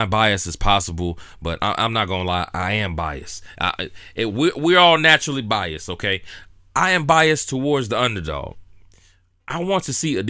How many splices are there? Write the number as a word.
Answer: zero